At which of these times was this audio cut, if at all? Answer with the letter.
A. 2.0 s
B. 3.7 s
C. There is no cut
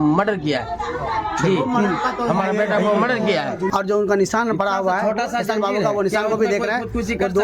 B